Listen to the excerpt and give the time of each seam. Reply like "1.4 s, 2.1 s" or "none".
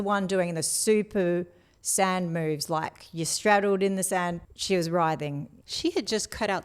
4.4 s, 5.5 s